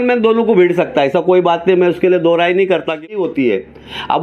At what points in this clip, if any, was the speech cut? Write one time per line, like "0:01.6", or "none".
0:03.1